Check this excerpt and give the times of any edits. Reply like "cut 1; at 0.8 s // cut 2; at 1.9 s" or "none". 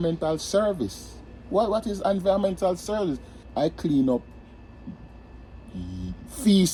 none